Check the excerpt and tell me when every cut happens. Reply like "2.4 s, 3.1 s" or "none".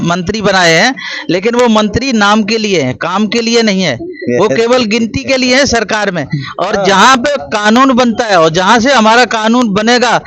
none